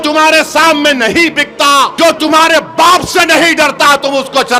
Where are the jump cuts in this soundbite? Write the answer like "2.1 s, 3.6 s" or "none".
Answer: 1.9 s